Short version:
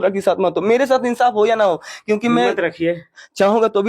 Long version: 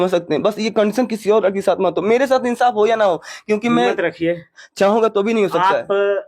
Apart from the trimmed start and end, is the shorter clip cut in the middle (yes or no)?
no